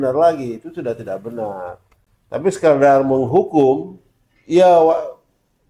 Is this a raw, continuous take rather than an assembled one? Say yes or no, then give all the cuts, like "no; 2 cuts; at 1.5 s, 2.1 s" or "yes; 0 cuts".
yes; 0 cuts